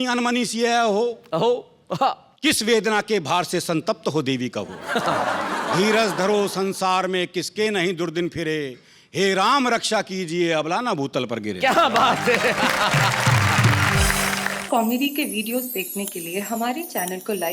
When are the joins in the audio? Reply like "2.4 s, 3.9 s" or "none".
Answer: 14.5 s